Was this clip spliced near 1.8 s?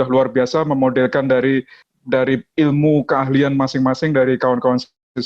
yes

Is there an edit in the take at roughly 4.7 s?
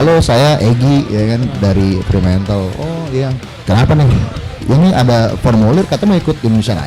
no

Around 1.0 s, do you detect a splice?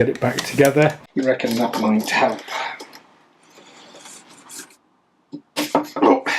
yes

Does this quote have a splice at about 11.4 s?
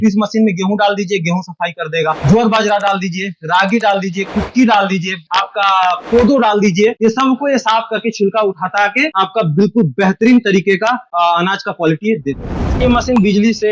no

